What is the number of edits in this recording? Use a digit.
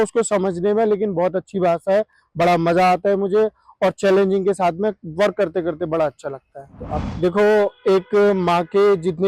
1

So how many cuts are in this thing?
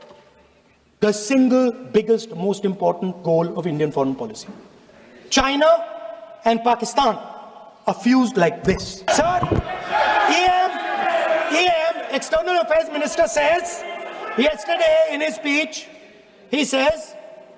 1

